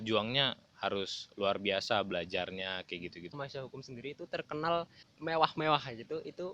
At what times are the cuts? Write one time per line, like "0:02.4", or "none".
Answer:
0:03.4